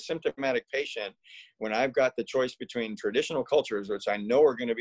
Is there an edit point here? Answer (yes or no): no